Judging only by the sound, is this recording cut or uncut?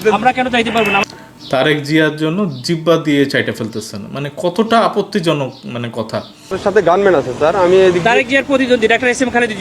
cut